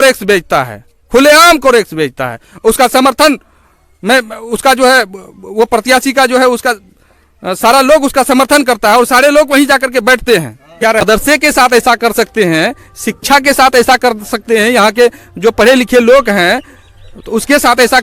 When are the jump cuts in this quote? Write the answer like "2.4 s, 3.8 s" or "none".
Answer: 11.0 s